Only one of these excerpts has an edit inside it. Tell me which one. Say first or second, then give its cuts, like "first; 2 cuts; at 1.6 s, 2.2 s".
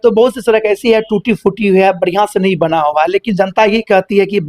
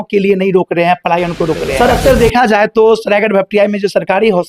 second; 1 cut; at 1.7 s